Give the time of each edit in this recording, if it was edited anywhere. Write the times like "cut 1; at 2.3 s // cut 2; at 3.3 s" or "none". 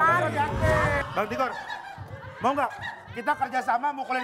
cut 1; at 1.1 s